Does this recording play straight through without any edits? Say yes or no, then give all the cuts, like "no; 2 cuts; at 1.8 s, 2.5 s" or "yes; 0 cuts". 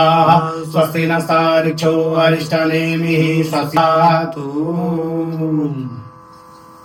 yes; 0 cuts